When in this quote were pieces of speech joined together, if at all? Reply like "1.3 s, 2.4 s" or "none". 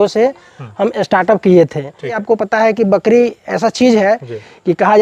2.2 s